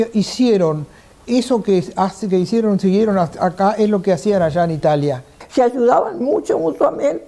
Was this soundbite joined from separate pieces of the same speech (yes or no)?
yes